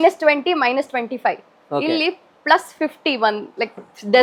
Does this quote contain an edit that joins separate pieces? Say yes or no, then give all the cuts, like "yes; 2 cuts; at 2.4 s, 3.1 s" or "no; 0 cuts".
no; 0 cuts